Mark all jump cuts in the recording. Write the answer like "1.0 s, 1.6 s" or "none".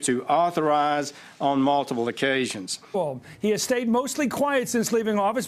none